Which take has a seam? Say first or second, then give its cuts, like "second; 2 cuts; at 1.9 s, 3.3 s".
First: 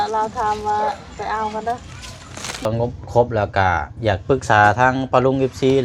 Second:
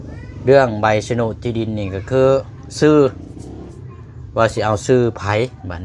first; 1 cut; at 2.7 s